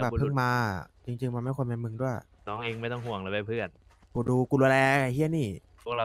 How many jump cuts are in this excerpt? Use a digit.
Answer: 1